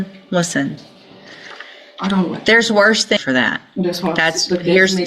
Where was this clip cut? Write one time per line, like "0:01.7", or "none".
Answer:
0:03.2